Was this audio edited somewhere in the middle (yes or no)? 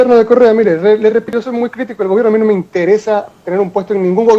yes